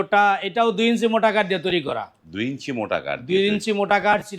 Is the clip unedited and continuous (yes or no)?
yes